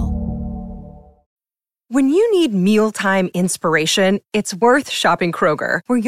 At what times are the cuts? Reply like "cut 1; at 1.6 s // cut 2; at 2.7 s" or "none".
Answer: cut 1; at 1.3 s